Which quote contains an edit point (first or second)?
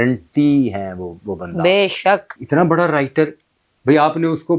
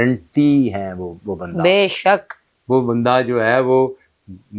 first